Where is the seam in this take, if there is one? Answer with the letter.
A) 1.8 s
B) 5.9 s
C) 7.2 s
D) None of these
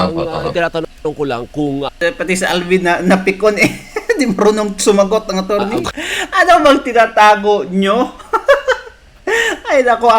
B